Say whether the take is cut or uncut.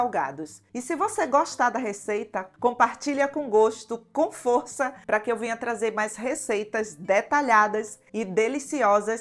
cut